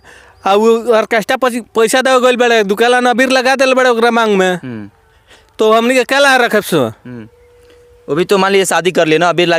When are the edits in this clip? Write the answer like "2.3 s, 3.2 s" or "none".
none